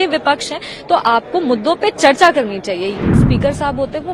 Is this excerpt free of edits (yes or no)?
no